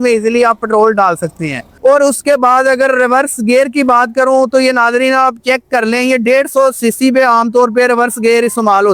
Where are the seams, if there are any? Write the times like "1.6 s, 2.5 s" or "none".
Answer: none